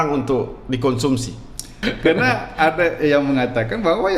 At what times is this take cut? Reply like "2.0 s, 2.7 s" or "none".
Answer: 1.8 s